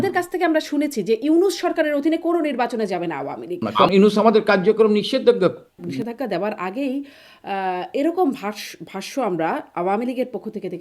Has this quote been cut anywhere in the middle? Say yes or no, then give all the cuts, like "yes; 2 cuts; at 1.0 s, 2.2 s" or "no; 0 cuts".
yes; 2 cuts; at 3.7 s, 5.9 s